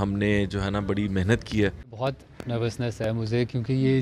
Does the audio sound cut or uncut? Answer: cut